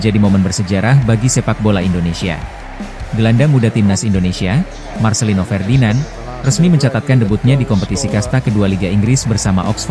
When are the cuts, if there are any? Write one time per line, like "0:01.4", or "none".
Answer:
0:03.0